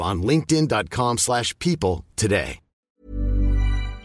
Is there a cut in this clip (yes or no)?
yes